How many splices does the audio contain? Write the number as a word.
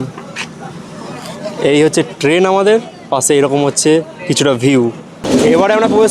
one